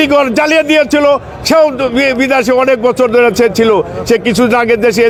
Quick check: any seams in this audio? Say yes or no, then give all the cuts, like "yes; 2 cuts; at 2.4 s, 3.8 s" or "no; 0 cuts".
no; 0 cuts